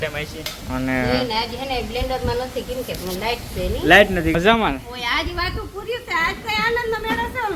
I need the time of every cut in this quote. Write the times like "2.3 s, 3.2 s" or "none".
4.3 s